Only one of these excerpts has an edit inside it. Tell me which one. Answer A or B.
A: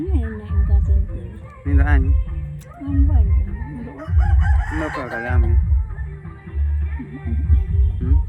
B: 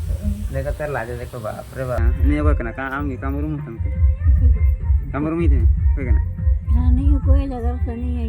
B